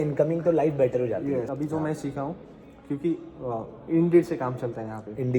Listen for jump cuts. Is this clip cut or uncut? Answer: cut